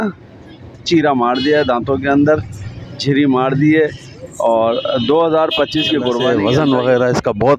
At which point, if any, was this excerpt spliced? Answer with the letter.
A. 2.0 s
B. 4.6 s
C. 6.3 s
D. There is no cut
C